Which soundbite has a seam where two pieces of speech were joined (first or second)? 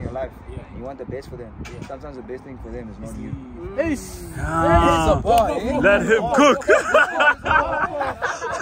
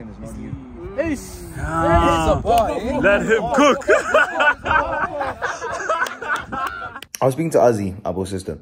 second